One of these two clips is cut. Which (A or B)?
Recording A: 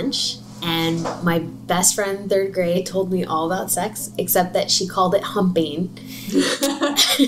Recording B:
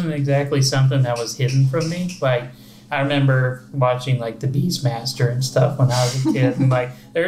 A